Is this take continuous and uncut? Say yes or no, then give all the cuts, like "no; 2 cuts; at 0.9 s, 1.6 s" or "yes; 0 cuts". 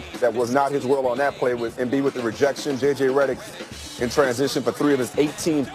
no; 1 cut; at 4.0 s